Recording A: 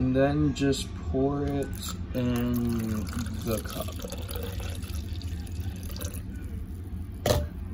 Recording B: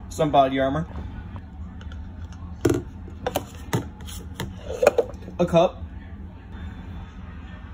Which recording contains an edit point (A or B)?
B